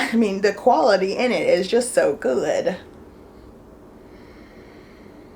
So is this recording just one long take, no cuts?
yes; 0 cuts

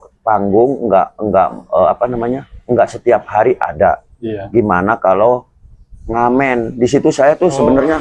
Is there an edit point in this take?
no; 0 cuts

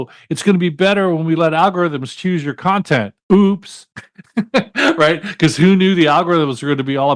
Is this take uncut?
no; 1 cut; at 3.1 s

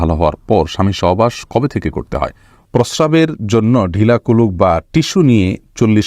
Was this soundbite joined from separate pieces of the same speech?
yes; 1 cut; at 2.7 s

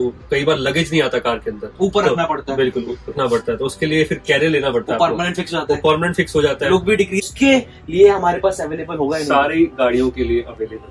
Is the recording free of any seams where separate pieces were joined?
no; 1 cut; at 7.3 s

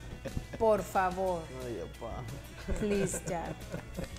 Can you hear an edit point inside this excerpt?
no; 0 cuts

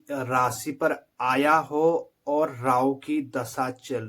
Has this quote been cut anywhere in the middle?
no; 0 cuts

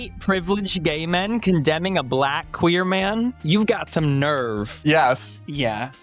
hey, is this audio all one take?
no; 1 cut; at 4.7 s

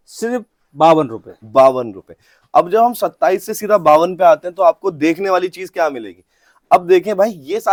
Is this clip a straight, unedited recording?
yes; 0 cuts

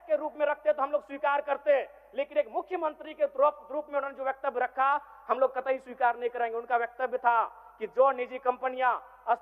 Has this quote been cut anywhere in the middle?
no; 0 cuts

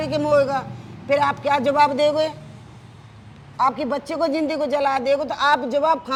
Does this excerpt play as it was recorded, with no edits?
yes; 0 cuts

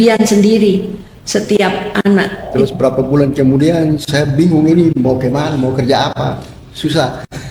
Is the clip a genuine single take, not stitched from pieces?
no; 1 cut; at 2.4 s

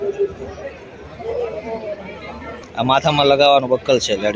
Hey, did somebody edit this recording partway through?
yes; 1 cut; at 2.6 s

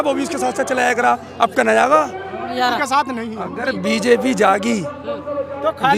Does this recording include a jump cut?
yes; 1 cut; at 2.8 s

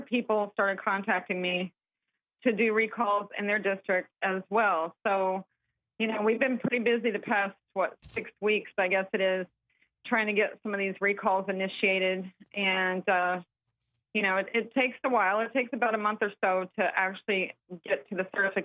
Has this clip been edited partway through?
yes; 1 cut; at 8.3 s

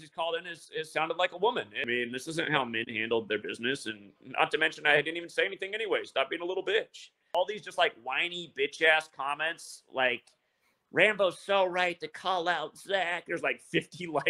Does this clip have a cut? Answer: yes; 2 cuts; at 1.8 s, 7.2 s

